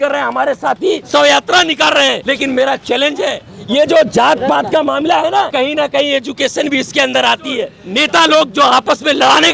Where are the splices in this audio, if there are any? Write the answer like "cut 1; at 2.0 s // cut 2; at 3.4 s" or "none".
cut 1; at 1.0 s // cut 2; at 2.2 s // cut 3; at 3.5 s // cut 4; at 5.5 s // cut 5; at 7.8 s

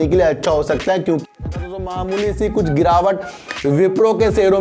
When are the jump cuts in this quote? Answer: cut 1; at 1.2 s

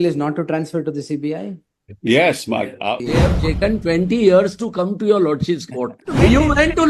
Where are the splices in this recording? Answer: cut 1; at 3.0 s // cut 2; at 6.0 s

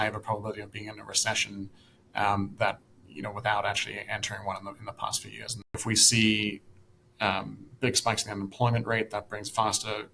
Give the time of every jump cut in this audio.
cut 1; at 5.7 s

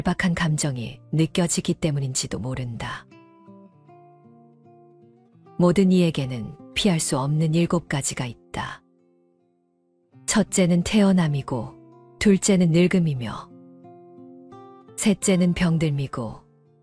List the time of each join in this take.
cut 1; at 3.1 s // cut 2; at 5.6 s

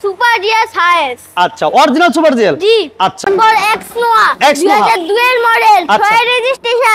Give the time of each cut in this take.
cut 1; at 3.2 s

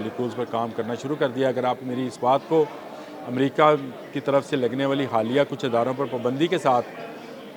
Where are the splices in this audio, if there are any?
none

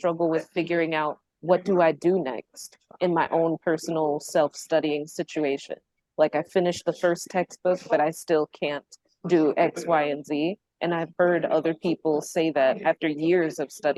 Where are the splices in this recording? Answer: none

